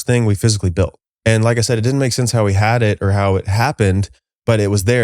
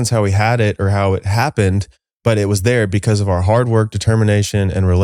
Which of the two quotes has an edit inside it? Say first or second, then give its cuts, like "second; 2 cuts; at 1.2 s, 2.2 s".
first; 1 cut; at 1.0 s